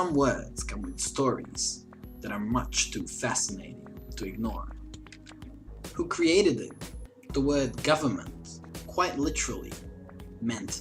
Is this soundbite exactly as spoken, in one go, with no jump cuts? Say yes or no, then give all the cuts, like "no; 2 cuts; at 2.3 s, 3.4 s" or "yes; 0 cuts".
yes; 0 cuts